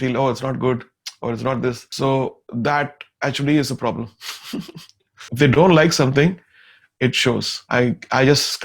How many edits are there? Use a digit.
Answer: 3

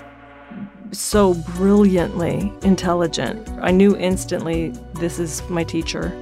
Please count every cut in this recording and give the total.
0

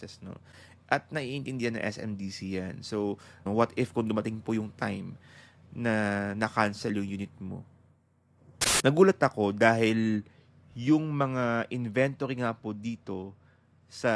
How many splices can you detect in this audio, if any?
2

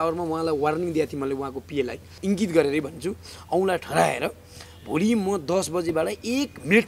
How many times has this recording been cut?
1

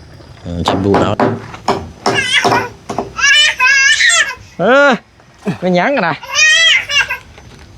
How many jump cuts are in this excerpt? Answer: 1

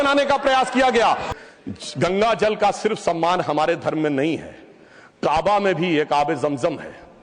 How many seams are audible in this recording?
1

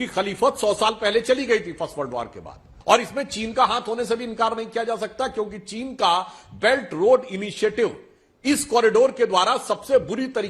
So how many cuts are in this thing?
1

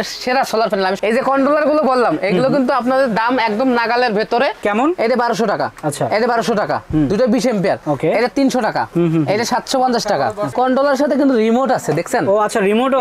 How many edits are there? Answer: 4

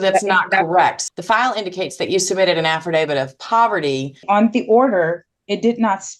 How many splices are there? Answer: 2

